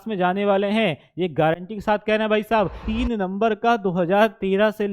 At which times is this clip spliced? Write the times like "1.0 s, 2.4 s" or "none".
2.8 s

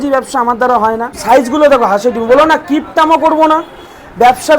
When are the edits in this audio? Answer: 1.1 s

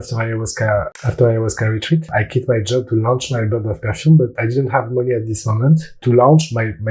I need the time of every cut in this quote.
0.9 s, 2.1 s, 4.4 s, 5.9 s

